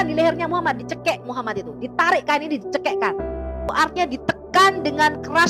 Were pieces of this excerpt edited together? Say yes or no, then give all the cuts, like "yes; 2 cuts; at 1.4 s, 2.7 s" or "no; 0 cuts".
yes; 1 cut; at 3.7 s